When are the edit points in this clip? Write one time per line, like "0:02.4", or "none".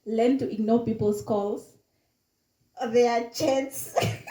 none